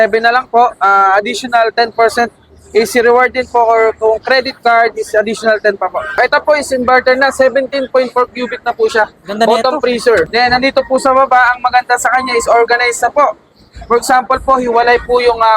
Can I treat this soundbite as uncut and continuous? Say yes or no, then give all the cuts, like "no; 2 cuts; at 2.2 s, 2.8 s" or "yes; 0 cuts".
no; 2 cuts; at 6.2 s, 10.3 s